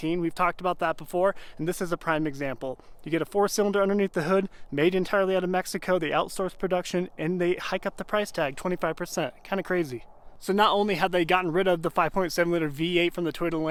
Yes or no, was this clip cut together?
no